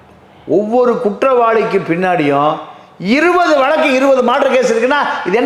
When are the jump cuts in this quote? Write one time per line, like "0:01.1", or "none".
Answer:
none